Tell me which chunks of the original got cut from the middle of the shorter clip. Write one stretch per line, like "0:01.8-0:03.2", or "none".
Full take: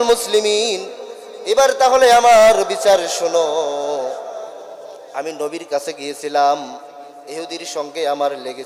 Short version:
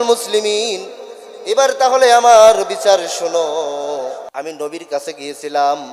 0:04.3-0:05.1